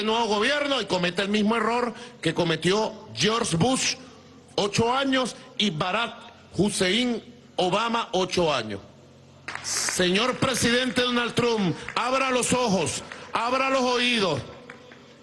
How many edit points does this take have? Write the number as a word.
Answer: one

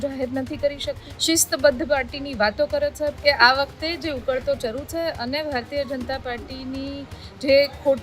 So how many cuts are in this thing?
two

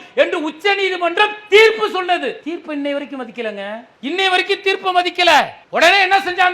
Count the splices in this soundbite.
two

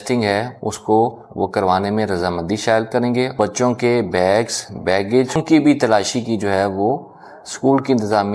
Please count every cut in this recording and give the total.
two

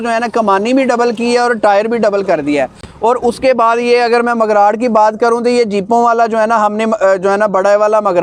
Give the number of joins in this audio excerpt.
zero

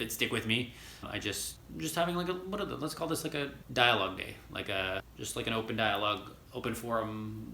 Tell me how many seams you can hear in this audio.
one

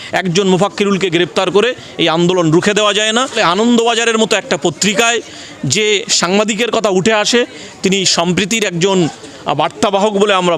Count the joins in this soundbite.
one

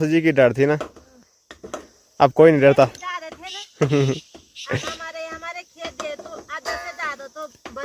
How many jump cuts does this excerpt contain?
zero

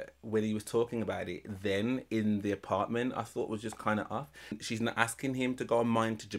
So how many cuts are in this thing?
one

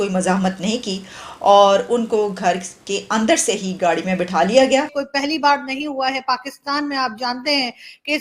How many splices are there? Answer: one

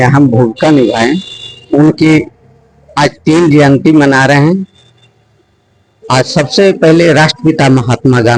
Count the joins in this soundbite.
zero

